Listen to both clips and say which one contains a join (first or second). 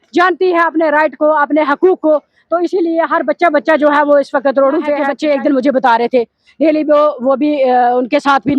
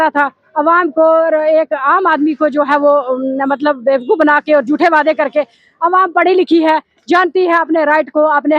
first